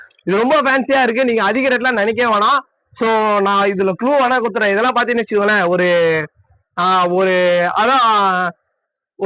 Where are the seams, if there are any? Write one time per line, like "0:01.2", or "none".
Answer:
none